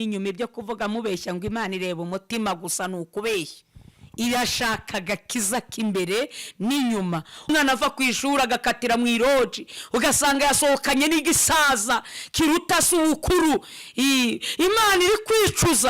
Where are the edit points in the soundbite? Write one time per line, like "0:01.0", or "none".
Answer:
0:07.5